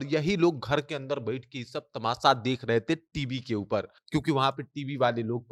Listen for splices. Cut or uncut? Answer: uncut